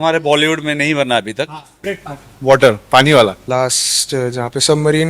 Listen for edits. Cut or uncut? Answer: cut